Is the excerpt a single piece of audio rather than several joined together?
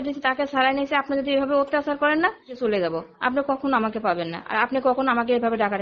no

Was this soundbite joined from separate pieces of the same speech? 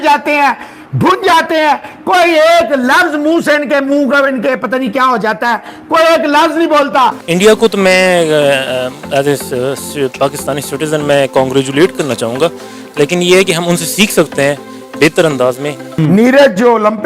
yes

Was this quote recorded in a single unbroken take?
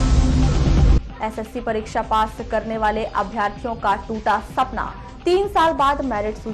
no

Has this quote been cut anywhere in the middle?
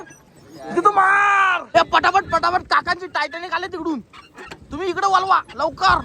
yes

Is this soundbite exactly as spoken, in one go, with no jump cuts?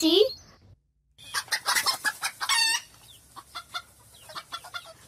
no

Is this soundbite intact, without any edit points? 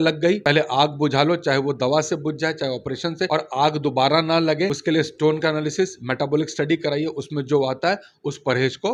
yes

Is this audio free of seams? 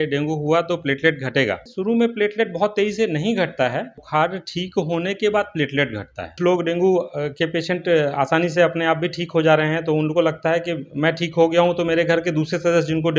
no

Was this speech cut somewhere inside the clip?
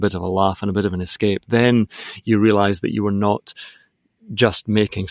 no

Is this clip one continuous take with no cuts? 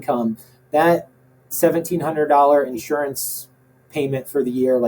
no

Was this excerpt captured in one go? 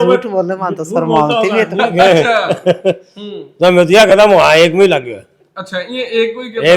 yes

